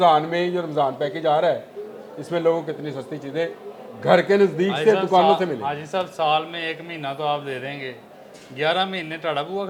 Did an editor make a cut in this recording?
no; 0 cuts

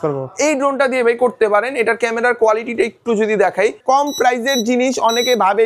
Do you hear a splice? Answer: yes; 1 cut; at 3.8 s

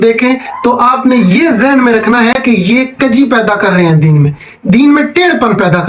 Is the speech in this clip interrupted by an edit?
no; 0 cuts

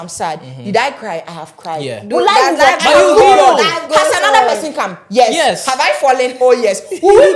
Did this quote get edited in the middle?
no; 0 cuts

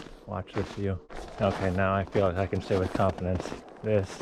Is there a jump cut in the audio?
yes; 1 cut; at 1.1 s

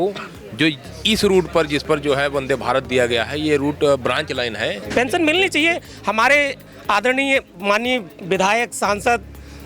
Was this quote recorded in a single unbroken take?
no; 1 cut; at 4.8 s

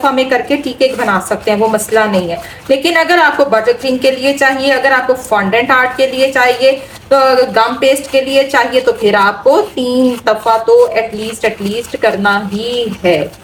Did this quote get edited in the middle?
no; 0 cuts

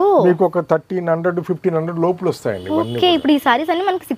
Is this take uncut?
yes; 0 cuts

